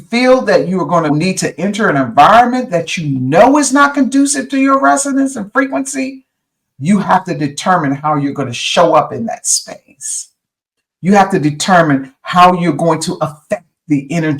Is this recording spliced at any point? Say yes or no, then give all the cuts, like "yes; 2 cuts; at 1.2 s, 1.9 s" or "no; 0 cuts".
yes; 1 cut; at 1.1 s